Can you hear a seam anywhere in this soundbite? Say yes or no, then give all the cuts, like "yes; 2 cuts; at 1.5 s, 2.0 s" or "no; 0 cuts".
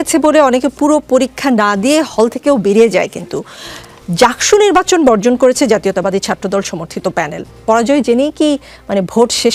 no; 0 cuts